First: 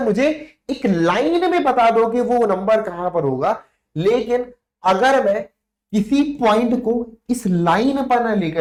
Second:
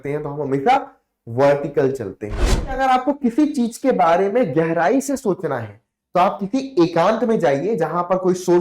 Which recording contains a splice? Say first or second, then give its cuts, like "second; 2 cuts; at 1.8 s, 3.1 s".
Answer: second; 1 cut; at 2.7 s